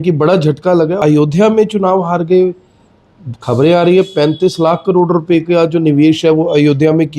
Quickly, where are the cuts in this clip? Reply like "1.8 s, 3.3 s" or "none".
1.0 s